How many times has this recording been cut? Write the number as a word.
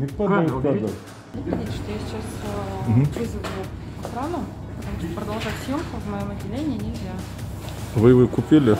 two